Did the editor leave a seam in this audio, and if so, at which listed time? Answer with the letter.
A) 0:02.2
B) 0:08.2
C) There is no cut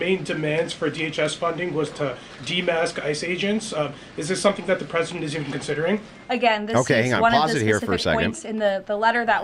C